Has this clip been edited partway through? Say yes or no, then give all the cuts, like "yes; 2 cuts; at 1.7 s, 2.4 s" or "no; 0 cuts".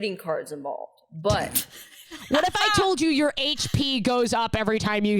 yes; 1 cut; at 2.2 s